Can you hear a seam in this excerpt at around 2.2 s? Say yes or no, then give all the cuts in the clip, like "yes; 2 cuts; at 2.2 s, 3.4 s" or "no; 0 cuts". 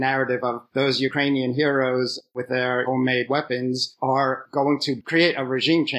no; 1 cut; at 5.0 s